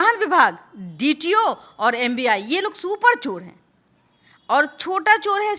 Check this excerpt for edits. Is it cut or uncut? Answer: uncut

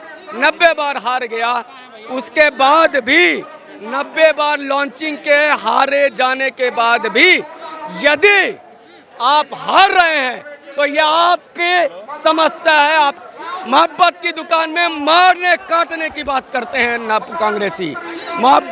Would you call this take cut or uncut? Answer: cut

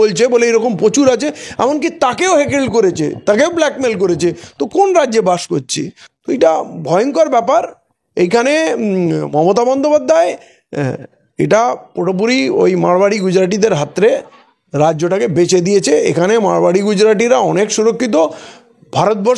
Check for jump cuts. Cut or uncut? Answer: uncut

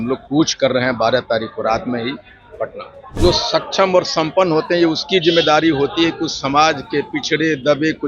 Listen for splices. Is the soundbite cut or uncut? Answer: cut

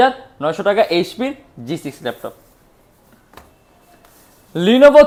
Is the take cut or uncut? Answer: uncut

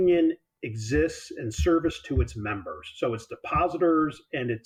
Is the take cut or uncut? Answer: uncut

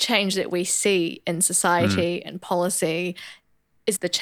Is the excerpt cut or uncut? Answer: uncut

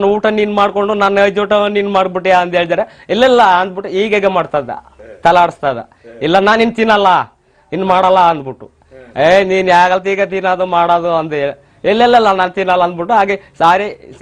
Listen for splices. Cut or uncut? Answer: uncut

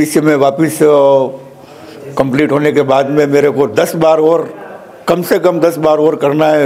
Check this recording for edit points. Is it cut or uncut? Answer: uncut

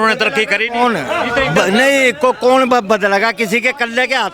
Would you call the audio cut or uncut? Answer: uncut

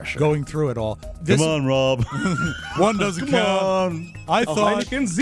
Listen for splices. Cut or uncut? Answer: cut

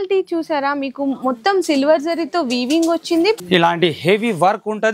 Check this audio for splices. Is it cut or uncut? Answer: cut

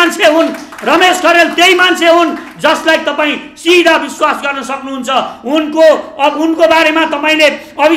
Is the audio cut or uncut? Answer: uncut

